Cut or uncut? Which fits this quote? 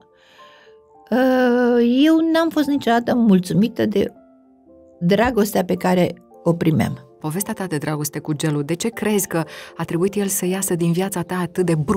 cut